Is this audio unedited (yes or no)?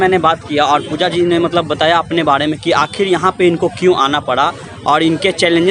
yes